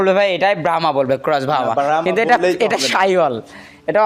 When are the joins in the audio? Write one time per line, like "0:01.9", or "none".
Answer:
none